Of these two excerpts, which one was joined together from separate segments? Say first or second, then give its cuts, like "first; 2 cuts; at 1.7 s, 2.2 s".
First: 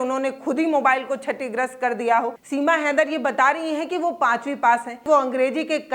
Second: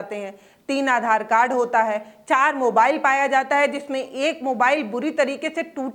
first; 2 cuts; at 2.4 s, 5.1 s